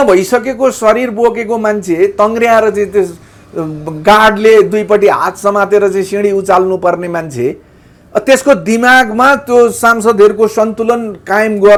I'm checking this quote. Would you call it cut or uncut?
uncut